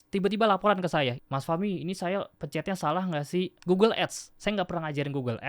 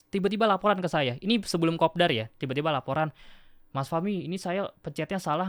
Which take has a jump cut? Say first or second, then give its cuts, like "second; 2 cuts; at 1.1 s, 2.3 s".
first; 2 cuts; at 1.2 s, 3.6 s